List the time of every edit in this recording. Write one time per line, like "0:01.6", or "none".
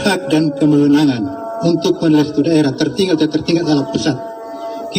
none